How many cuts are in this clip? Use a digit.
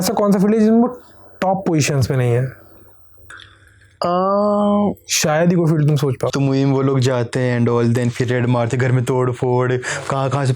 1